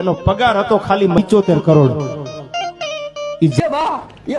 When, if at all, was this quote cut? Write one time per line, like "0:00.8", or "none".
none